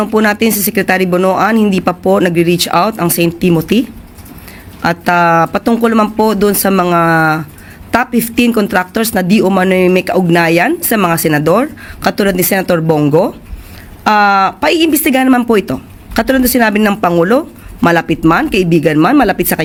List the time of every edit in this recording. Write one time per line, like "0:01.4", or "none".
none